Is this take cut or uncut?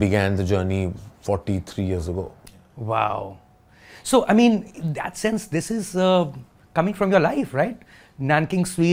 uncut